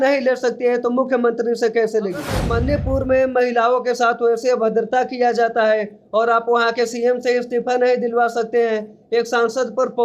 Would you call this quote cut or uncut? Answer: cut